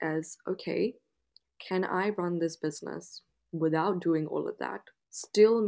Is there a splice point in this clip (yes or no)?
no